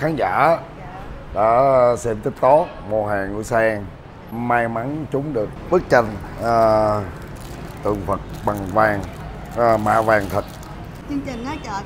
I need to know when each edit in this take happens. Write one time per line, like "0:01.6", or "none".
0:04.3
0:05.6
0:11.0